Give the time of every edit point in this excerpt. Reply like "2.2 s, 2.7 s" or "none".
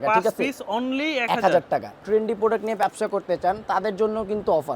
2.0 s